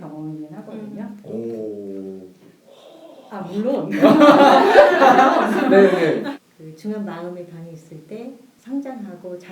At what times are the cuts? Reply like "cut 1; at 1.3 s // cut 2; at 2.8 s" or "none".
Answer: cut 1; at 1.2 s // cut 2; at 6.3 s // cut 3; at 8.5 s